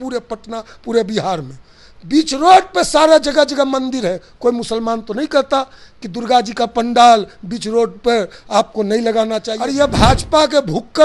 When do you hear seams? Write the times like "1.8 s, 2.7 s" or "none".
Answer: 9.5 s